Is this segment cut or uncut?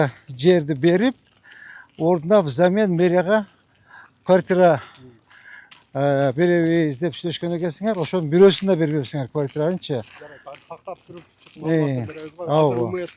uncut